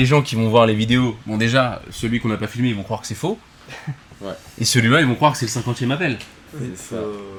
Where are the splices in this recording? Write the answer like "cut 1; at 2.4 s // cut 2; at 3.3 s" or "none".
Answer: none